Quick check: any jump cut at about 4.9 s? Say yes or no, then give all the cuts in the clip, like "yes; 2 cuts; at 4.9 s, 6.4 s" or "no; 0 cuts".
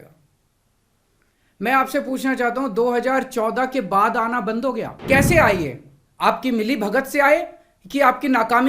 yes; 1 cut; at 4.9 s